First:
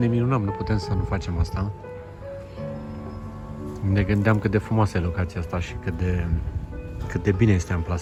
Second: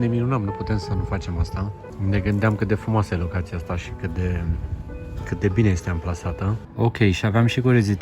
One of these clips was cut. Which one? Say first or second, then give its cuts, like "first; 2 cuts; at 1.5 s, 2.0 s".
second; 2 cuts; at 1.9 s, 6.6 s